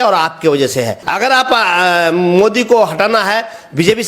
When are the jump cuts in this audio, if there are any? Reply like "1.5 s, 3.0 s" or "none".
0.9 s

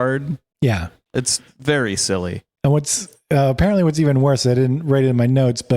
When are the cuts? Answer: none

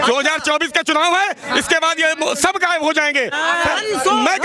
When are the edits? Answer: 3.4 s

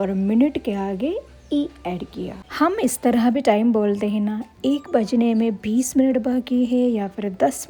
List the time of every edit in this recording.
none

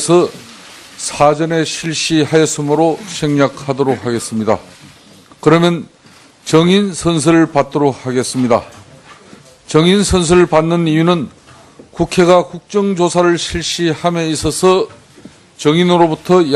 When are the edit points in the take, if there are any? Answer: 4.0 s

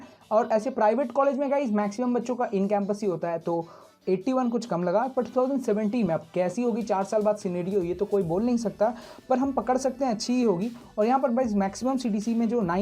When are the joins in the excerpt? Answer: none

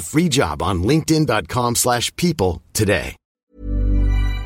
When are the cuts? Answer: 3.2 s

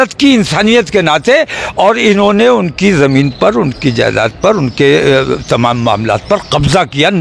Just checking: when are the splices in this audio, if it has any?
none

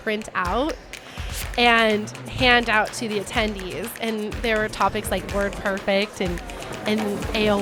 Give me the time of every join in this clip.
none

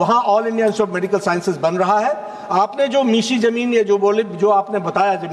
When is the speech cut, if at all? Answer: none

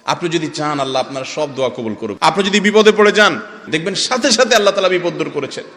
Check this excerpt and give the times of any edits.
2.2 s, 3.7 s

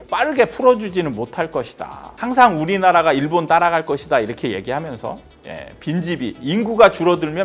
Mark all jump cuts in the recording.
2.1 s

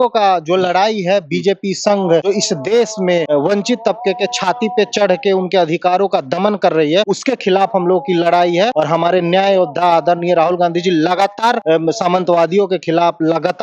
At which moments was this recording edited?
2.3 s, 3.3 s, 7.1 s, 8.7 s, 11.6 s

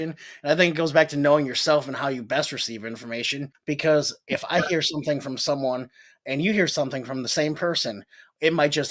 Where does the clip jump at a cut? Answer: 3.5 s

